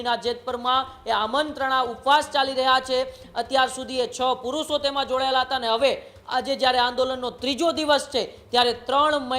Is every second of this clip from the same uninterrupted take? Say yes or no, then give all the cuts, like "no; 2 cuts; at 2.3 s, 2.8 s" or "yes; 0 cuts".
yes; 0 cuts